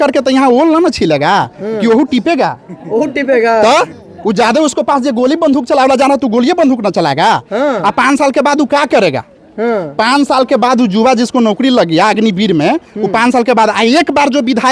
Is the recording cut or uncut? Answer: uncut